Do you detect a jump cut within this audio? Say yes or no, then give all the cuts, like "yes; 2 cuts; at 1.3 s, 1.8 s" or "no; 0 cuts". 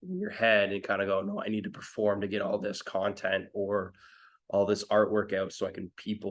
no; 0 cuts